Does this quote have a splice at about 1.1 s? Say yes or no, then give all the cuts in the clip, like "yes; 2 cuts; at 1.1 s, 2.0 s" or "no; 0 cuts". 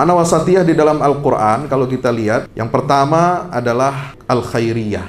no; 2 cuts; at 2.6 s, 4.1 s